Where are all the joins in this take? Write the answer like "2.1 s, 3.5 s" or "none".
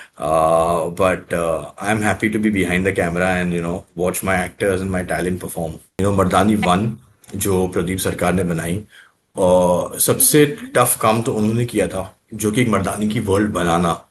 5.8 s